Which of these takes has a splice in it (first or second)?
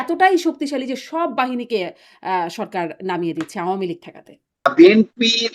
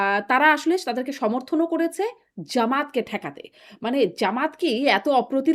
first